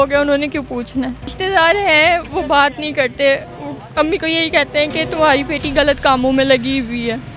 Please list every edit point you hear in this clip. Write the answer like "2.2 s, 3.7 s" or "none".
1.4 s